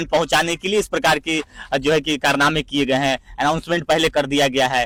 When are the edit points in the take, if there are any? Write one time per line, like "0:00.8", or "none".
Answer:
none